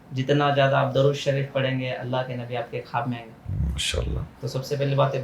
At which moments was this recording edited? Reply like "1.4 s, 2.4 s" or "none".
none